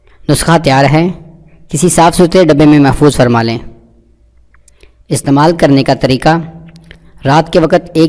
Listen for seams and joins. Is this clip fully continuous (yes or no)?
yes